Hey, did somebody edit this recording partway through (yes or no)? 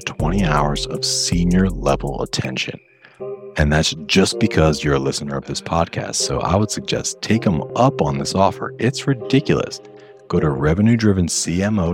no